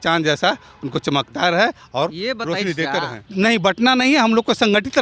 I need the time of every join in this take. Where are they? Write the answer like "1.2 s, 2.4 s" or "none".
3.3 s